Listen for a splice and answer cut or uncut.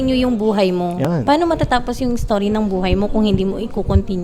uncut